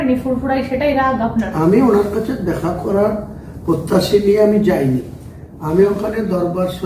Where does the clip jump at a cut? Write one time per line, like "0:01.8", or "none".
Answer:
none